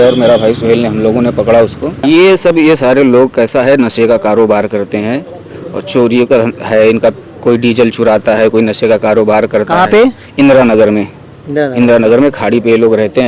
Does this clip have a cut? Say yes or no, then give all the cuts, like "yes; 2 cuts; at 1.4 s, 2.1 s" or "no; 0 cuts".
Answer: yes; 1 cut; at 2.0 s